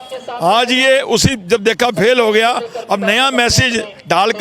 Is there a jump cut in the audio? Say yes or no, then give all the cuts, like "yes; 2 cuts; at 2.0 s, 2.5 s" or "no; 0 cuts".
no; 0 cuts